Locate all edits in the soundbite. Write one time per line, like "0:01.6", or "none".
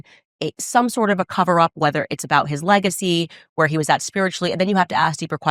none